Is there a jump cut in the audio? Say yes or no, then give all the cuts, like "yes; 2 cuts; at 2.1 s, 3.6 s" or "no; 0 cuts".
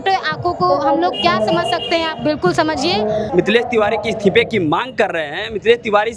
yes; 1 cut; at 3.3 s